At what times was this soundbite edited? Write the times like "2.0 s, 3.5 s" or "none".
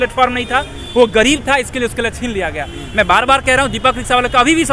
none